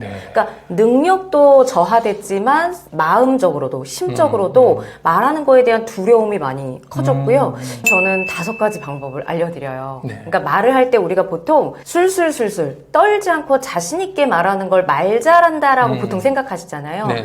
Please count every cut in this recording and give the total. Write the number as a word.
one